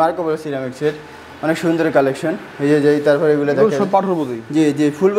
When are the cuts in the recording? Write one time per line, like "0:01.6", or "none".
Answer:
none